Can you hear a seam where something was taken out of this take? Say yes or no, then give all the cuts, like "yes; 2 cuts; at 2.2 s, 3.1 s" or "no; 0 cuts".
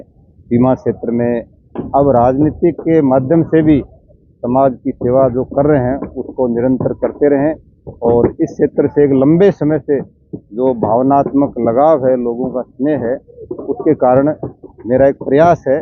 no; 0 cuts